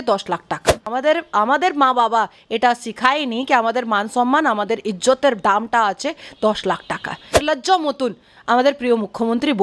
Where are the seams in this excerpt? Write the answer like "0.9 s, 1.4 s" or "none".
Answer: 0.9 s, 7.4 s